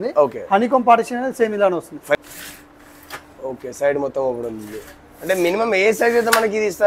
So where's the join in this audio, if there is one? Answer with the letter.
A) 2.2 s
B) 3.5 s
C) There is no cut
A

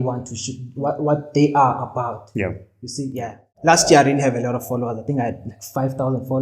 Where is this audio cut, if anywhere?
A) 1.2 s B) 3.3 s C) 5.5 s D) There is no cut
B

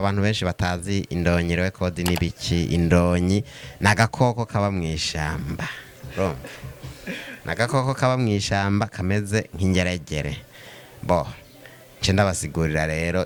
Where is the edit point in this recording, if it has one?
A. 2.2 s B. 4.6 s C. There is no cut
C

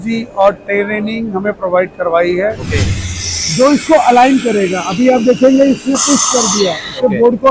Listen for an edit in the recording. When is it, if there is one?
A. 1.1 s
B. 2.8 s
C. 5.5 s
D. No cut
B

